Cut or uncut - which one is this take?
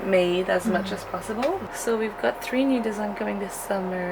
cut